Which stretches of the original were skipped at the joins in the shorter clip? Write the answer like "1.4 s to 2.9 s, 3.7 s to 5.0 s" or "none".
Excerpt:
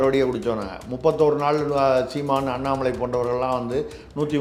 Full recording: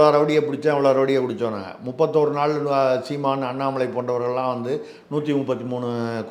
none